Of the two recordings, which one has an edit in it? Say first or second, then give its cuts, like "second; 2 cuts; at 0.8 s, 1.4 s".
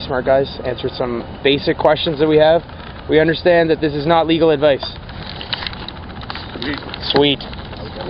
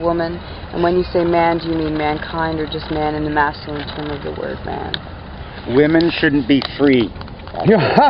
first; 1 cut; at 4.3 s